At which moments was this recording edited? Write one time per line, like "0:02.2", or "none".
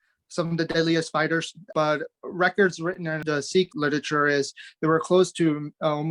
0:01.7
0:03.5